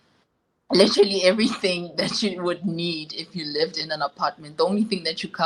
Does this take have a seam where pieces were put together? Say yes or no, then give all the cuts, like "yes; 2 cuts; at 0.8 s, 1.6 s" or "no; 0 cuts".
no; 0 cuts